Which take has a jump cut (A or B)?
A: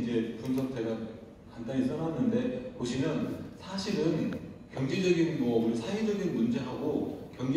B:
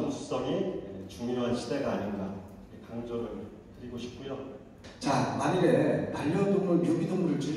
B